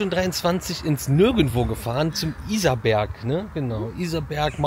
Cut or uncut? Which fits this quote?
uncut